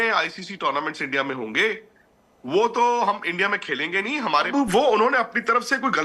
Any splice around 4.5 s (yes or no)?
yes